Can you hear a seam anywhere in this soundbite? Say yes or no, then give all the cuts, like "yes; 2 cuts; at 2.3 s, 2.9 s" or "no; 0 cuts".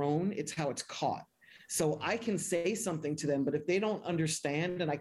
no; 0 cuts